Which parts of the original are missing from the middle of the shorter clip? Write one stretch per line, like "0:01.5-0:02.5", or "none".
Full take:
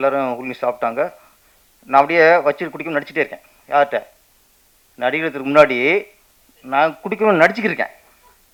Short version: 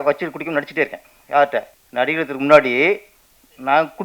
0:04.2-0:04.8